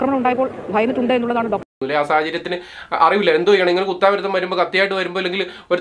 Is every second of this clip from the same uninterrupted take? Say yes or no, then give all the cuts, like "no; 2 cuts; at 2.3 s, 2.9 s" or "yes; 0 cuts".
no; 1 cut; at 1.7 s